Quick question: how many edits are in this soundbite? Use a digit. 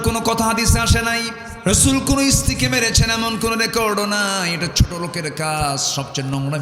1